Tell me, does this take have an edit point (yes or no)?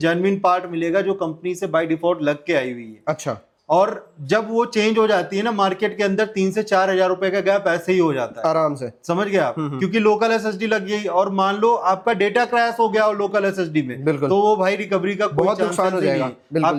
no